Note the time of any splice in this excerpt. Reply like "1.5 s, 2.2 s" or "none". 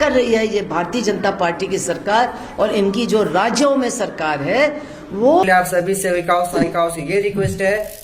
5.4 s